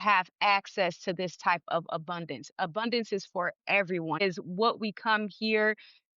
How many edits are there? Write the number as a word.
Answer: one